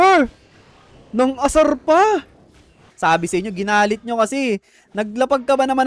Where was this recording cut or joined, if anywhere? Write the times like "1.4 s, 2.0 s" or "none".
2.8 s